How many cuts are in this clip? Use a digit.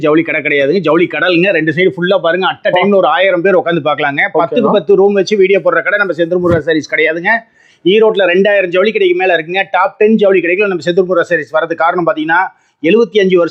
0